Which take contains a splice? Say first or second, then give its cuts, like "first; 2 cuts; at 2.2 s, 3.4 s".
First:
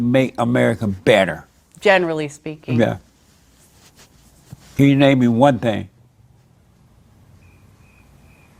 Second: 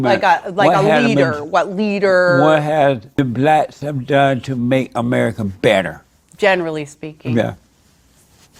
second; 1 cut; at 3.1 s